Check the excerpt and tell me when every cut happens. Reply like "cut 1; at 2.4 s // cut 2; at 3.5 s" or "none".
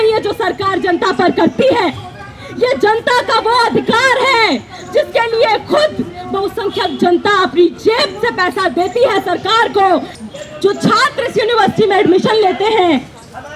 cut 1; at 10.1 s